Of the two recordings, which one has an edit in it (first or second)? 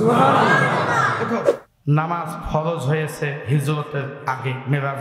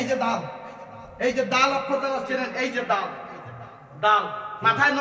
first